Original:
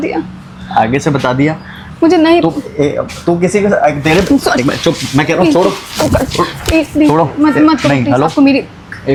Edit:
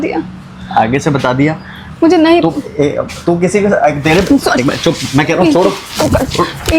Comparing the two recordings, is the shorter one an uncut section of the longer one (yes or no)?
yes